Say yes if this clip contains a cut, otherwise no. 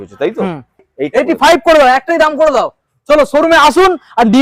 yes